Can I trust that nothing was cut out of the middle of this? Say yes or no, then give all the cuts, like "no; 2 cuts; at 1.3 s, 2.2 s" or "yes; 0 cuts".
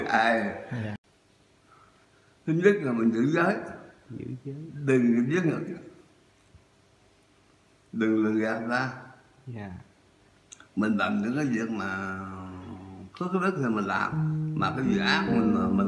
no; 1 cut; at 1.0 s